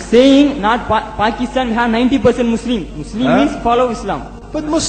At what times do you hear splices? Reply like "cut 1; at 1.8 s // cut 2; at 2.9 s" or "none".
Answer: none